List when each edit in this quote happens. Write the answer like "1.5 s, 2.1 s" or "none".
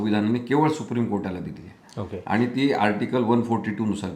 none